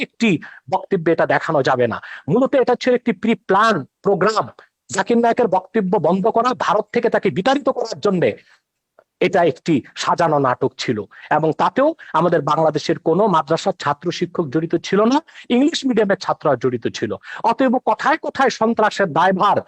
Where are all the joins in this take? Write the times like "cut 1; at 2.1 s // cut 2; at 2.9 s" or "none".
none